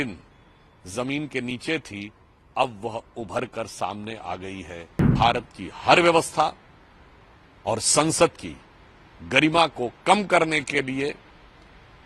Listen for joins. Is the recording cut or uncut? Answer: cut